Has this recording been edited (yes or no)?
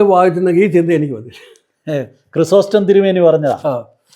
no